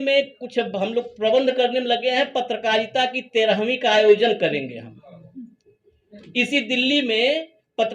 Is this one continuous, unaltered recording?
yes; 0 cuts

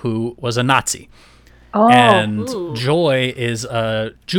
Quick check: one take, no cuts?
yes; 0 cuts

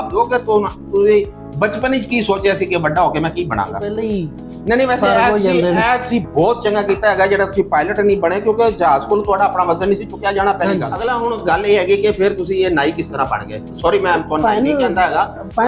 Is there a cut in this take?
yes; 2 cuts; at 3.9 s, 11.0 s

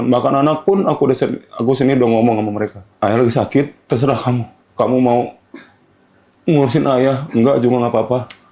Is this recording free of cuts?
no; 2 cuts; at 2.8 s, 4.7 s

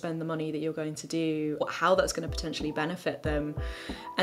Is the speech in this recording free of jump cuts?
no; 1 cut; at 1.6 s

